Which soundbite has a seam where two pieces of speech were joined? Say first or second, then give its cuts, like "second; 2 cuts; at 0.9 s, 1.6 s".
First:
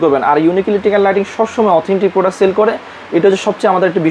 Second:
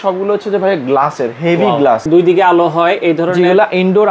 second; 1 cut; at 2.0 s